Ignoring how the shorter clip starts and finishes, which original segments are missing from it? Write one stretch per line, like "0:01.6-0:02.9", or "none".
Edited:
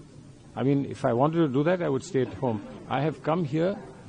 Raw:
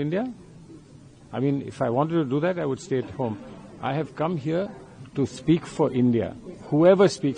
0:03.5-0:03.7